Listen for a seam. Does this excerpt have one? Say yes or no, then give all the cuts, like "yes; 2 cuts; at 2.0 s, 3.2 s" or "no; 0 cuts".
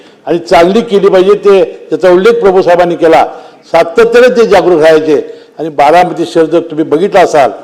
no; 0 cuts